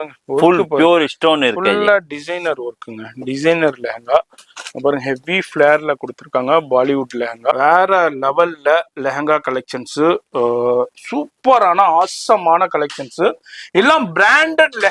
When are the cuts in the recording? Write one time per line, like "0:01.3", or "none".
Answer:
0:07.5